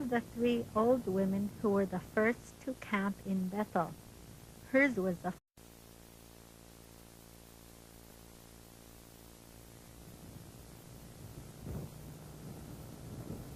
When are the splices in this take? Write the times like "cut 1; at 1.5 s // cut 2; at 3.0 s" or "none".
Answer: none